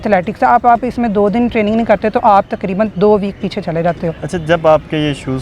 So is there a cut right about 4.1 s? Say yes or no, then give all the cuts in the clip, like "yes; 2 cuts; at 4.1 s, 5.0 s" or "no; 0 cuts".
no; 0 cuts